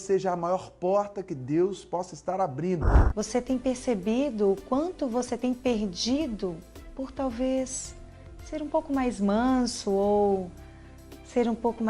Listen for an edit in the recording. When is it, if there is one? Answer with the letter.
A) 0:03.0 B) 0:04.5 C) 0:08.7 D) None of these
A